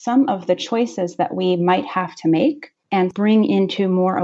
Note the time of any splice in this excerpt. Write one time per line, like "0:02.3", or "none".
0:03.1